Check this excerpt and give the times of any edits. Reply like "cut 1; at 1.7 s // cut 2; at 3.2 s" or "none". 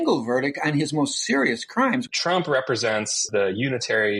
cut 1; at 2.1 s // cut 2; at 3.3 s